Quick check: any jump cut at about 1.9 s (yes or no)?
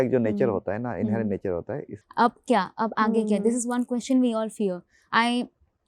yes